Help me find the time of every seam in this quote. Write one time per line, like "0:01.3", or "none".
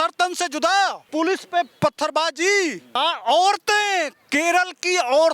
0:01.0
0:02.9